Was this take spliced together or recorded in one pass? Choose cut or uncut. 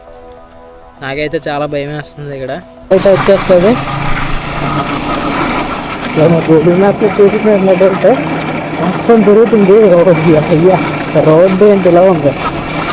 cut